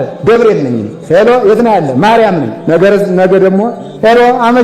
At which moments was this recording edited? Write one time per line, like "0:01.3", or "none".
0:02.5